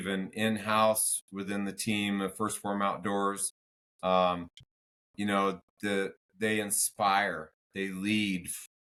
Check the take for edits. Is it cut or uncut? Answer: uncut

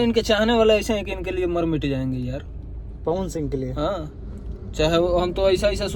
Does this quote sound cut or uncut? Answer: uncut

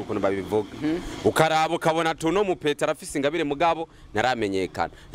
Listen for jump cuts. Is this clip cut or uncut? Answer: uncut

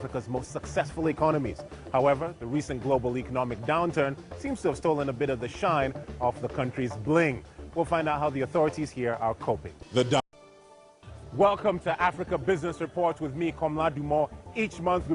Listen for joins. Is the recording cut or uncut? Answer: uncut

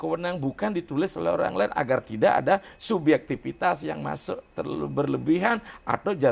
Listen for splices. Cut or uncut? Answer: uncut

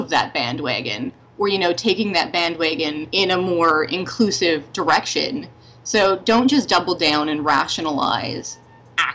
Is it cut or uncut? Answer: cut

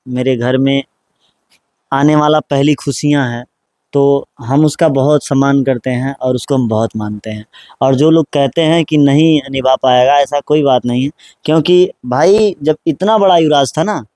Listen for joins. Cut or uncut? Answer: uncut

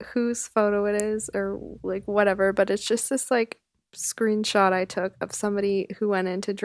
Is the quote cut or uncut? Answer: uncut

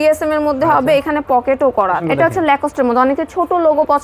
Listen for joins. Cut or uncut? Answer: cut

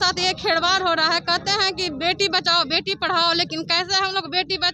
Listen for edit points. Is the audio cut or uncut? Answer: uncut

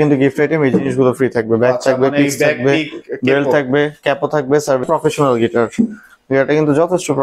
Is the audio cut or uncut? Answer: cut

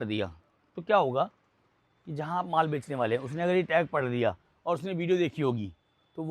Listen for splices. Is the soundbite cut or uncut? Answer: uncut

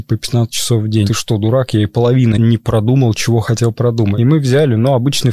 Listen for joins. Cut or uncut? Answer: cut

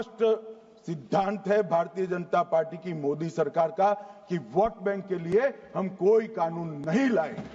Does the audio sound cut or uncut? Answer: uncut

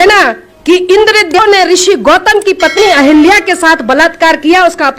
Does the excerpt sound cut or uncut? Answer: cut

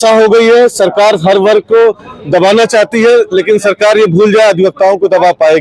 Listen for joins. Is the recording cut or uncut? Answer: uncut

